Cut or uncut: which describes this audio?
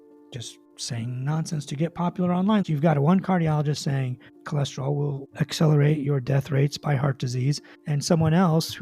cut